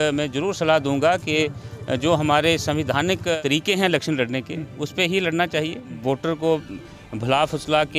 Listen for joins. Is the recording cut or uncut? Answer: cut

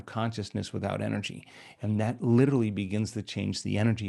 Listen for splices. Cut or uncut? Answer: uncut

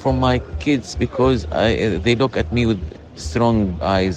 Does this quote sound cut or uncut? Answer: cut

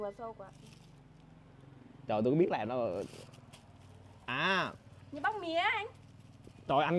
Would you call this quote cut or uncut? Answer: uncut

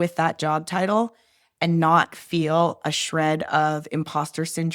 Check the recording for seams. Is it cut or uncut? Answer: uncut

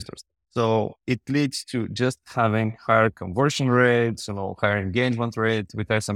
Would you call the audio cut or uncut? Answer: cut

